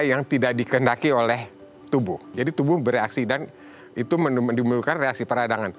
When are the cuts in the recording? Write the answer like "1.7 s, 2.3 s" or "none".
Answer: 2.2 s

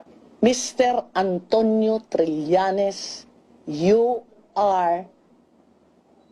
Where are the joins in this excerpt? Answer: 1.1 s

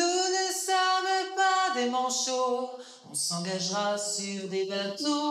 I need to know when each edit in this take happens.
none

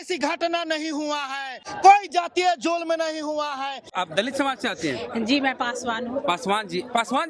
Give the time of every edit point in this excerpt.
3.9 s

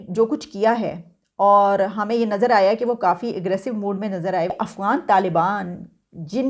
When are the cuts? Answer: 4.5 s

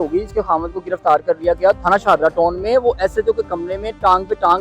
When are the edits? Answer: 1.8 s

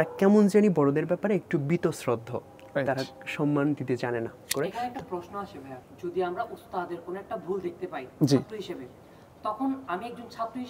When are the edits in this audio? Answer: 4.5 s, 5.8 s

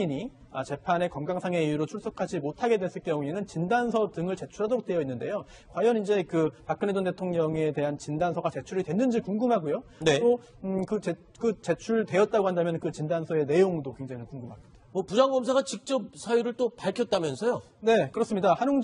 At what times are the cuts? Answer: 9.8 s

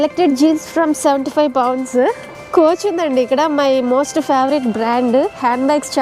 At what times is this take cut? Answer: 2.3 s

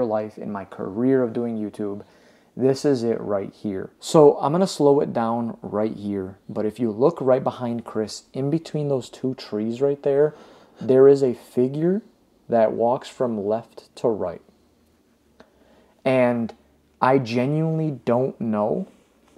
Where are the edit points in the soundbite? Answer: 3.9 s

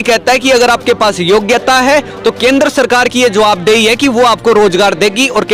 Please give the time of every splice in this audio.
none

